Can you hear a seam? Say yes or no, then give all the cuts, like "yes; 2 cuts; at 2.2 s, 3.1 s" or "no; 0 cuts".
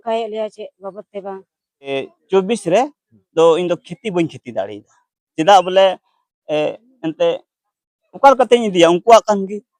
yes; 1 cut; at 1.9 s